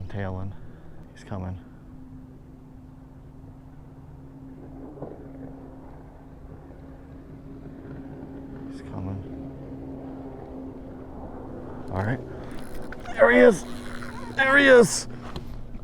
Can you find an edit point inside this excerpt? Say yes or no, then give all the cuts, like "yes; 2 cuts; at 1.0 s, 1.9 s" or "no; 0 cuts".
yes; 1 cut; at 1.0 s